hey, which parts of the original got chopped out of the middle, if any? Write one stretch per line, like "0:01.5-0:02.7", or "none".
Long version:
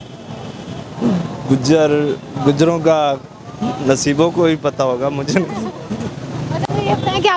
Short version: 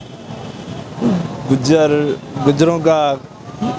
none